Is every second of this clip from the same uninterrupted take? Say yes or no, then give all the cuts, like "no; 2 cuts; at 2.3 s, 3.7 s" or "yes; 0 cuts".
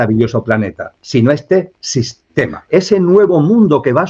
no; 1 cut; at 2.6 s